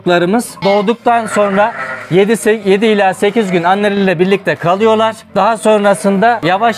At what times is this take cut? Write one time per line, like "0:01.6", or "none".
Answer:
none